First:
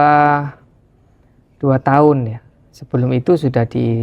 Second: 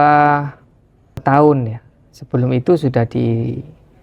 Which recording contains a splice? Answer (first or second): second